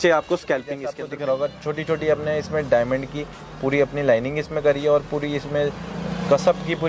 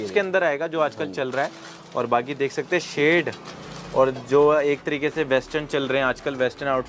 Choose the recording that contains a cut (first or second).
first